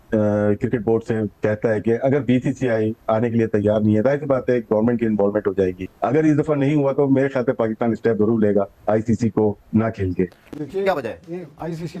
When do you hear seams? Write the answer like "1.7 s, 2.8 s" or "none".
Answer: 5.9 s, 10.5 s